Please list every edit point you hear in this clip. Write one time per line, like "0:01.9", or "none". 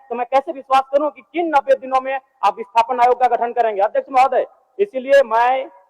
none